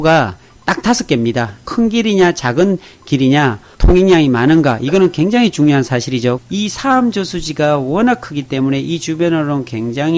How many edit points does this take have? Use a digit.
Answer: 2